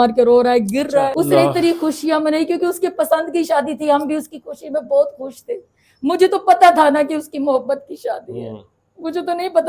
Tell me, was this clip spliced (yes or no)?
yes